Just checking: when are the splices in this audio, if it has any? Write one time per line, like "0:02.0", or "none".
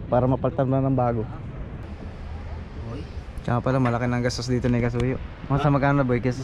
0:01.8